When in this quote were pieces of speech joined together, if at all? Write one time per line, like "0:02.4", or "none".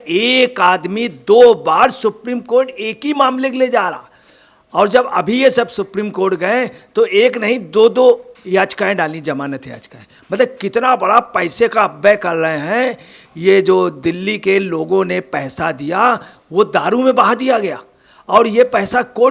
none